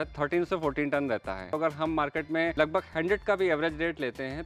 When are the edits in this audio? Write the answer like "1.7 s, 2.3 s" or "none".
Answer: 1.5 s, 2.5 s